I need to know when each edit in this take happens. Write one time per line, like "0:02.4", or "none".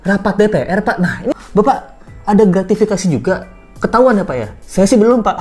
0:01.3